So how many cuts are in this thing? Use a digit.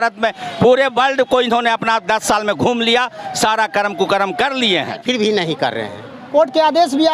1